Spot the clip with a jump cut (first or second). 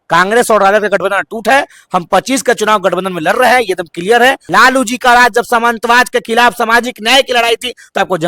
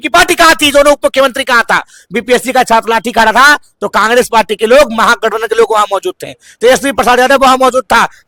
first